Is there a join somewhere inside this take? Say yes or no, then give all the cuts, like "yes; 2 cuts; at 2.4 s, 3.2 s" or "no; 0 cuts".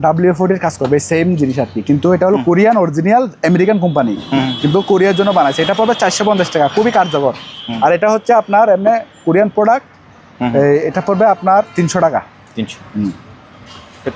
no; 0 cuts